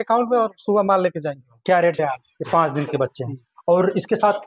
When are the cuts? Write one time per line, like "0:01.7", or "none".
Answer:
0:02.0